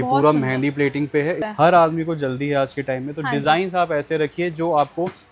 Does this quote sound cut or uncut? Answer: cut